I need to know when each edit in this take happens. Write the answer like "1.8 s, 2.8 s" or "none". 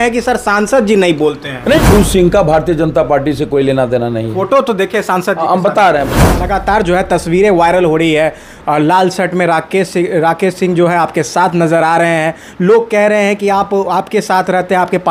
1.8 s, 6.3 s